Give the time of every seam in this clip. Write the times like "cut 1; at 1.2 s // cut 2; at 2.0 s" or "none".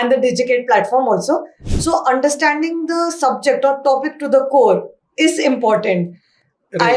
cut 1; at 1.6 s